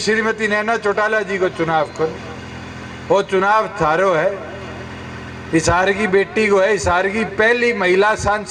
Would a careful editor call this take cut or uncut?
uncut